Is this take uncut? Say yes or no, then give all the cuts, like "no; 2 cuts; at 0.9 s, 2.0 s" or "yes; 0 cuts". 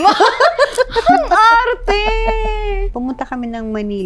no; 1 cut; at 2.8 s